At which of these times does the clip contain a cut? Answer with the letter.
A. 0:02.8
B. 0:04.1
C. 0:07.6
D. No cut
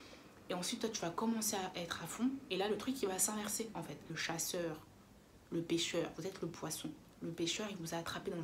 B